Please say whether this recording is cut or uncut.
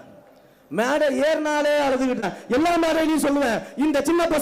cut